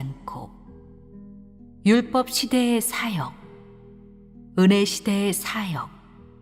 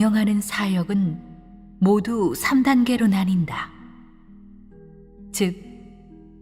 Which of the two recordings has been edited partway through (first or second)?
second